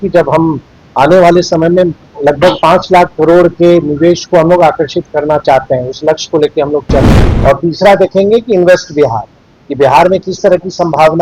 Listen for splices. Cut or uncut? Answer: cut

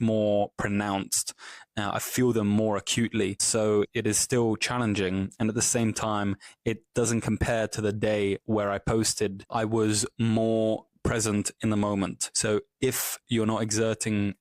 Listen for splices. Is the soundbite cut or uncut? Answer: cut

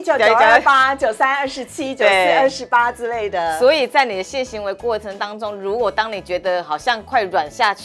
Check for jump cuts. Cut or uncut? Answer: uncut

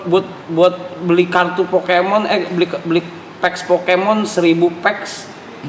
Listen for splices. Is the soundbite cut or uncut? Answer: uncut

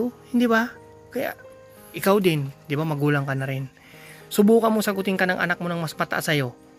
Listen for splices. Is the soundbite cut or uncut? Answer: cut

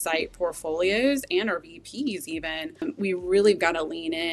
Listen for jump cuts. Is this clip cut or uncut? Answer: cut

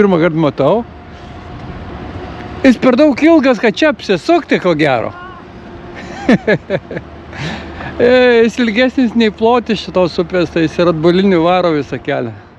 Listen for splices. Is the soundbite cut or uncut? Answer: uncut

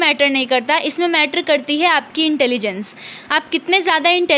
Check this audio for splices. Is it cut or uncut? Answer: uncut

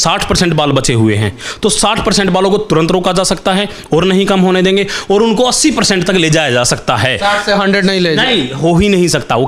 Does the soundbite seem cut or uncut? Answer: uncut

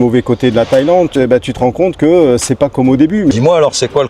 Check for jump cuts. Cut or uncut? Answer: cut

